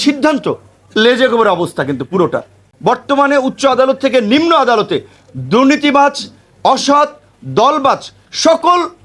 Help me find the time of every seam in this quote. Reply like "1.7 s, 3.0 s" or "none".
2.7 s